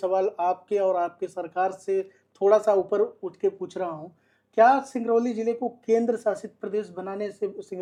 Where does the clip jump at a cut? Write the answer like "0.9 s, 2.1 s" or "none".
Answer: none